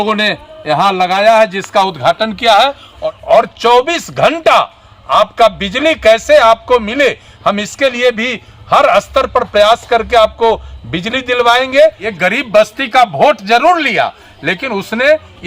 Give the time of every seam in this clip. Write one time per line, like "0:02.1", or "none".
0:03.0
0:12.1